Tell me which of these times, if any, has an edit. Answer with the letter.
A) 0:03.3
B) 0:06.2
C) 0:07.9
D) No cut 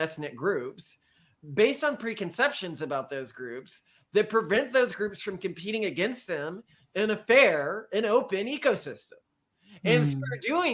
D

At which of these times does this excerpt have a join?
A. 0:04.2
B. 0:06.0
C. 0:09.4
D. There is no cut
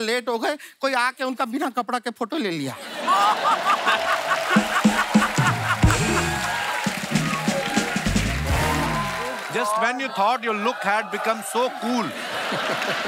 C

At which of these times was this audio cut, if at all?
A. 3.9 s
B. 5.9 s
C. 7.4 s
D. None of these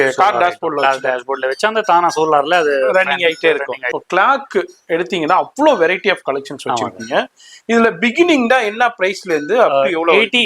A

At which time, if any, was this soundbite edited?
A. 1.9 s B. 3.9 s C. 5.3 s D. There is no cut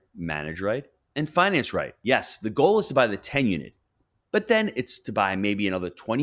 A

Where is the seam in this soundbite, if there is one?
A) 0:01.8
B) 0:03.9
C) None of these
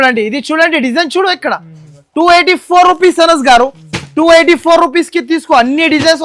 C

